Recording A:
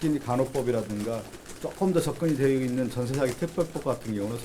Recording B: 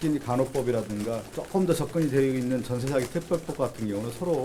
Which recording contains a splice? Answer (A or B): B